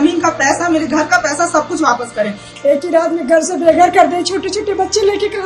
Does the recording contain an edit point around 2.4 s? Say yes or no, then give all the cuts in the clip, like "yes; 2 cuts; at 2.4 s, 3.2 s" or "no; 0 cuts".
yes; 1 cut; at 2.4 s